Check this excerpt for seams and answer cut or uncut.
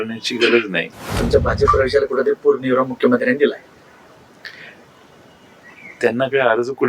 cut